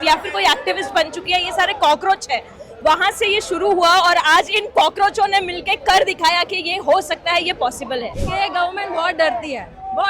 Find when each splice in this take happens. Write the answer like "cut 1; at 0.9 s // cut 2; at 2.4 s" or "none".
cut 1; at 8.2 s